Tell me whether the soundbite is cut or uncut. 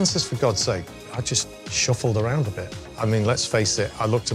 cut